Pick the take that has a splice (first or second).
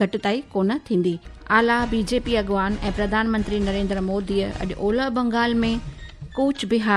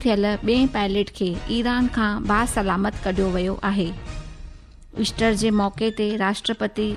first